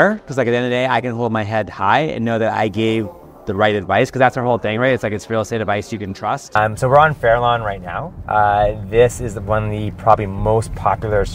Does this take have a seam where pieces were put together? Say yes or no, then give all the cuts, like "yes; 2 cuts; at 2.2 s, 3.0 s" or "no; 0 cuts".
yes; 1 cut; at 6.5 s